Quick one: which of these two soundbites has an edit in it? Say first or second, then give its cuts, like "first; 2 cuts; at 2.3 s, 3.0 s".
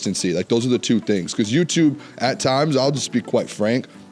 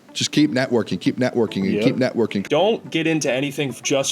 second; 1 cut; at 2.4 s